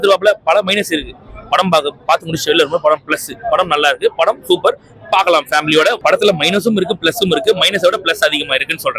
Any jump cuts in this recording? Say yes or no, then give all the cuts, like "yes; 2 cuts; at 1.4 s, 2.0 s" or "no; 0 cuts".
no; 0 cuts